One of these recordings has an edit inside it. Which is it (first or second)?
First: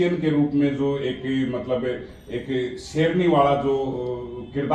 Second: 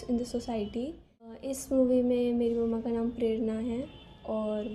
second